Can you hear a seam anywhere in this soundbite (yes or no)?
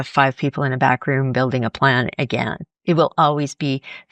no